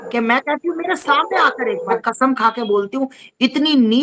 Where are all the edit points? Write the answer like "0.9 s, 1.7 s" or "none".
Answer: 2.1 s